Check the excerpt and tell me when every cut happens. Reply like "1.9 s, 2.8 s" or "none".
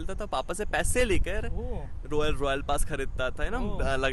none